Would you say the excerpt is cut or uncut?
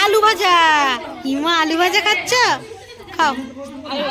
uncut